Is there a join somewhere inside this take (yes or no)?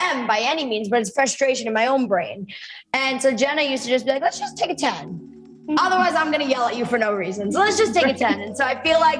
no